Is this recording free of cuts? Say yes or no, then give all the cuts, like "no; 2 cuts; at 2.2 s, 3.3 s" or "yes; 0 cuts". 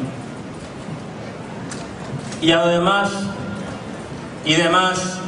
yes; 0 cuts